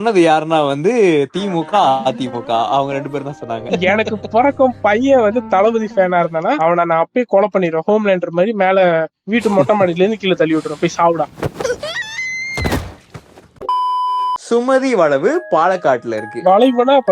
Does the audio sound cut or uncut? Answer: uncut